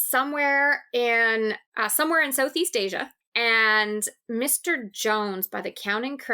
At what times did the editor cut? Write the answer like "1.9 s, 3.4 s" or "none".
3.2 s

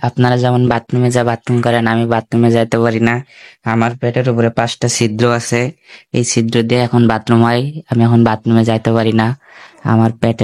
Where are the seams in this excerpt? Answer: none

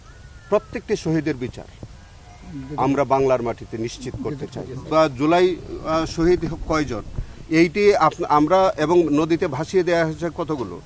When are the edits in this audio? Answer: 4.7 s

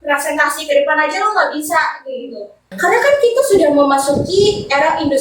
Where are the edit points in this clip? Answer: 2.7 s

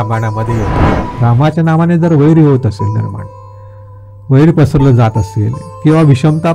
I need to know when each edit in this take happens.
1.0 s

